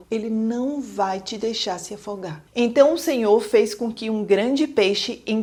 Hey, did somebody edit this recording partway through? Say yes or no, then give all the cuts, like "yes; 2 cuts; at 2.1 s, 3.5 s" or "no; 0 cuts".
no; 0 cuts